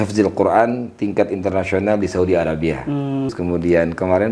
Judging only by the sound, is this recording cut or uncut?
cut